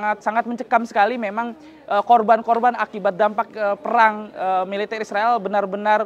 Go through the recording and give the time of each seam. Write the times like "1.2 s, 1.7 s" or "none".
none